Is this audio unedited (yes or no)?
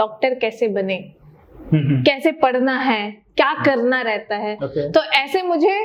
yes